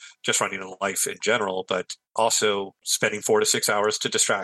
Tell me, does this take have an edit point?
yes; 2 cuts; at 2.0 s, 2.8 s

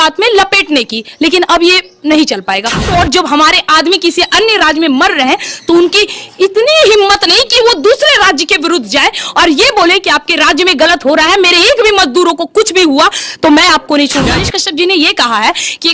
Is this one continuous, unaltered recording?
no; 2 cuts; at 2.9 s, 14.5 s

